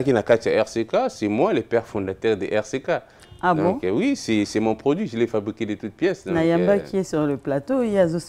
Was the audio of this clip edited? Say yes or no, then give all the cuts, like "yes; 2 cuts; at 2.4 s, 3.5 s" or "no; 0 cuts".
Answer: no; 0 cuts